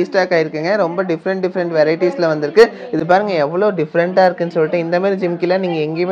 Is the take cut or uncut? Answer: uncut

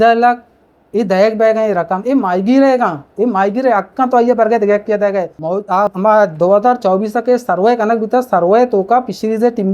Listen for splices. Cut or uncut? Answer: cut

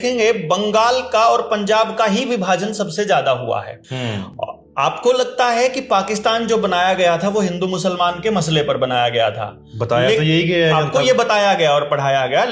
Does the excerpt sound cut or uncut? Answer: uncut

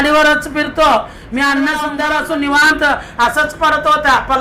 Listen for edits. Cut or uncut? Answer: cut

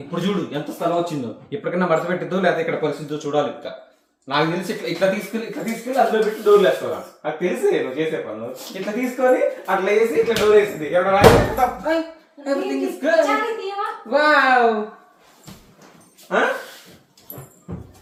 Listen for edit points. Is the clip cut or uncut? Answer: uncut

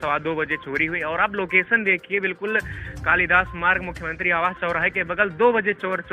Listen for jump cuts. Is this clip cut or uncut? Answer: uncut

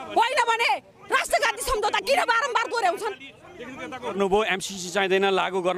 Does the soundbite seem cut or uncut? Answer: cut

